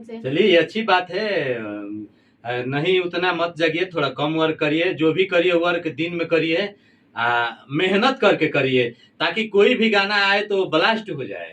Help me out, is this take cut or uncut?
uncut